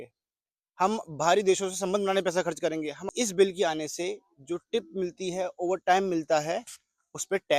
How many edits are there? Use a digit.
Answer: 1